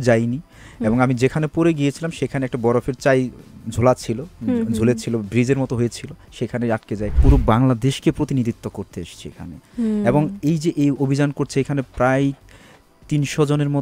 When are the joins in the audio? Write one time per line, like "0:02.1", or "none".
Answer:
0:07.2